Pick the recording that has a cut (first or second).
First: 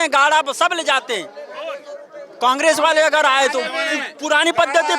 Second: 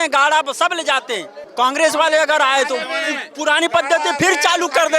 second